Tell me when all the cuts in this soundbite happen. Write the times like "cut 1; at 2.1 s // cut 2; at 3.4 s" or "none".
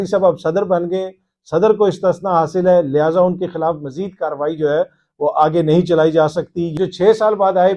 cut 1; at 6.7 s